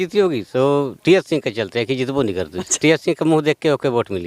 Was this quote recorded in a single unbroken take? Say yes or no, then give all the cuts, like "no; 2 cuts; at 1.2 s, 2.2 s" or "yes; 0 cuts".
no; 1 cut; at 2.7 s